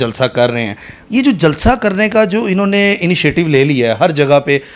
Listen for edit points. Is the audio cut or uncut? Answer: uncut